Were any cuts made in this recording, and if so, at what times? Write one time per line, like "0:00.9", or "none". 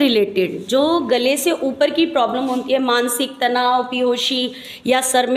none